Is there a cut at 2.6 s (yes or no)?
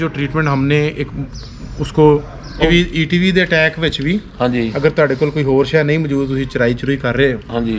yes